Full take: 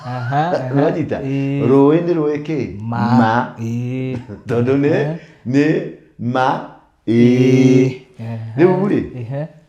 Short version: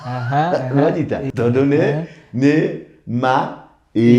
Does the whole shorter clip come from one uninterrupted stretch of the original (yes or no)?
no